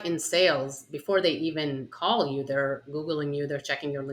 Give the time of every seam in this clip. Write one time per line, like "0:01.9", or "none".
0:01.9
0:02.8